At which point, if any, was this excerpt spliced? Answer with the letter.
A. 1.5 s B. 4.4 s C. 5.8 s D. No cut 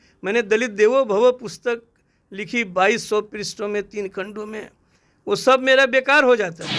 D